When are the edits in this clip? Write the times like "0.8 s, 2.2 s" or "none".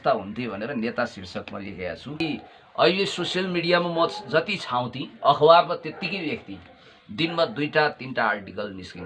2.1 s